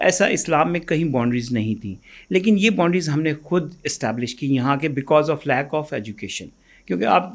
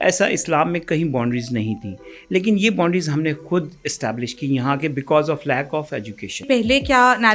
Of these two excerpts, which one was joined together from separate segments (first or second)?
second